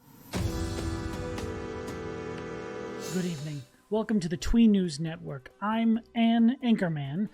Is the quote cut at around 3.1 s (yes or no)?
yes